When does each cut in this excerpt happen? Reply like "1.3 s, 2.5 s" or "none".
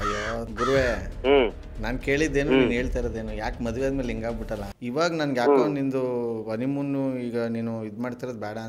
4.6 s